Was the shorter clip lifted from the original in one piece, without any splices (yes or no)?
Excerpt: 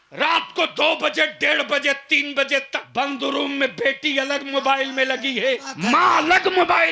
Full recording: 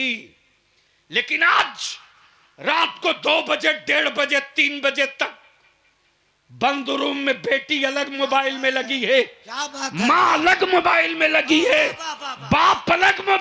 no